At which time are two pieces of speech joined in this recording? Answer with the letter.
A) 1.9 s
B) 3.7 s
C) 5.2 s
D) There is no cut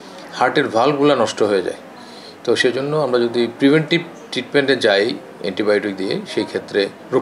D